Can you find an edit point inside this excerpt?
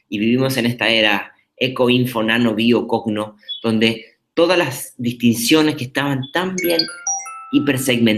no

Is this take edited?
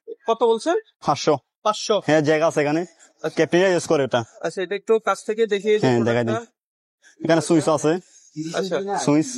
no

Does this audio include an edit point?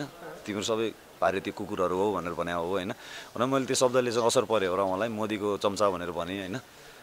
no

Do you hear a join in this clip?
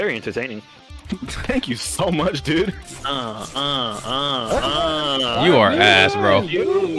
yes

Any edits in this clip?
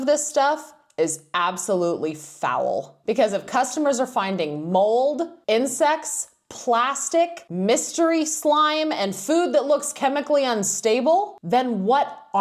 no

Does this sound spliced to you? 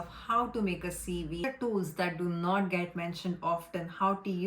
yes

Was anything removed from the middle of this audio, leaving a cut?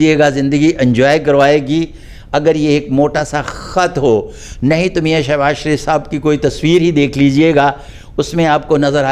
no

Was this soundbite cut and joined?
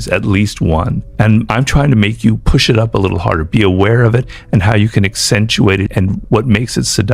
yes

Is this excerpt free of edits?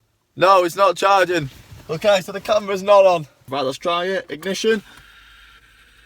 no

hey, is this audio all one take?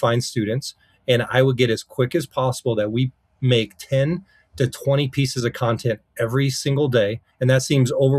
no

